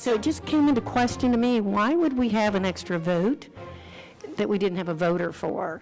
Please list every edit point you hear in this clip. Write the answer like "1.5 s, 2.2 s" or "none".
none